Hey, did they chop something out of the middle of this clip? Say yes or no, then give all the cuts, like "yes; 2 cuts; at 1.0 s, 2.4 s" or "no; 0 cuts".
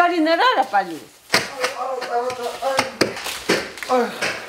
yes; 1 cut; at 3.2 s